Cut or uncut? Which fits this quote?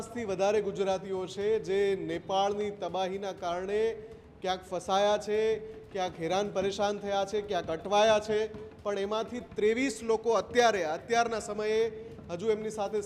uncut